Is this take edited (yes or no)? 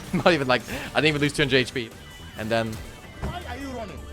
yes